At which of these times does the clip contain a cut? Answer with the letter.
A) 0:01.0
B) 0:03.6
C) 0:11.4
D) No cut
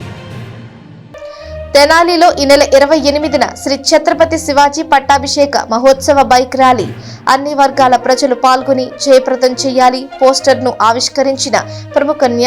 A